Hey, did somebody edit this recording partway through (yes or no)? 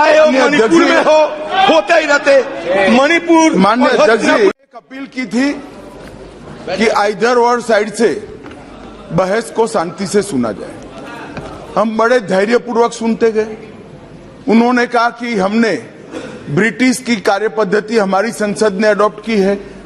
yes